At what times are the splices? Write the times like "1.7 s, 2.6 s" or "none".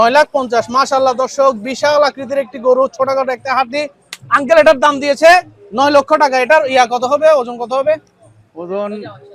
none